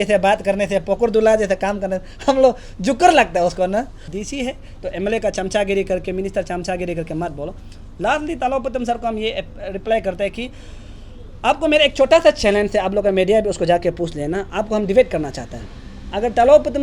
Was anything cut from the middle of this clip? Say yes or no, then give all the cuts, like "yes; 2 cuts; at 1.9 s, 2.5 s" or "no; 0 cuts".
yes; 1 cut; at 4.0 s